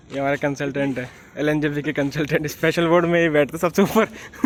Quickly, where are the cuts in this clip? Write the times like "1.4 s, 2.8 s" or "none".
none